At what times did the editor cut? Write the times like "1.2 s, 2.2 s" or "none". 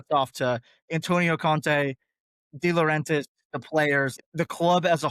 4.2 s